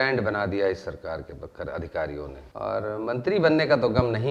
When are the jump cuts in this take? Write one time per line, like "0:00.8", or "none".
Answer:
0:02.3